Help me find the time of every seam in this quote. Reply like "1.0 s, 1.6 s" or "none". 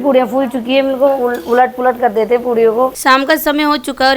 3.0 s